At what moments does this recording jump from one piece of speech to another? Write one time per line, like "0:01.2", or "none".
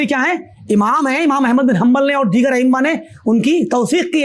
none